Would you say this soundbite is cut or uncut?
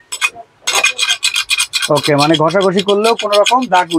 uncut